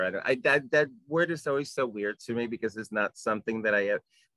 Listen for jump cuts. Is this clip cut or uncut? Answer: uncut